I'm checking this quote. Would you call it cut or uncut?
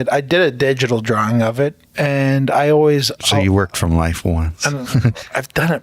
cut